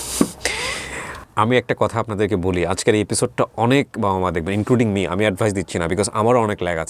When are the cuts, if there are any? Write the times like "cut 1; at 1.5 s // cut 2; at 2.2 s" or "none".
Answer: cut 1; at 1.2 s